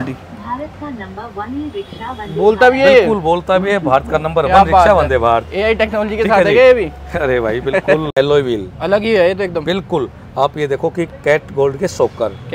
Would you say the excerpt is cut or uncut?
cut